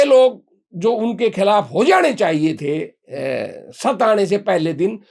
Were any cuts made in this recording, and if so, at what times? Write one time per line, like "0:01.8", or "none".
none